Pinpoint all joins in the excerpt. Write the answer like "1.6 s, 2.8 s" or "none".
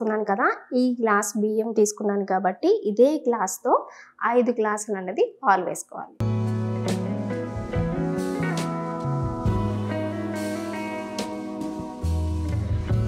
none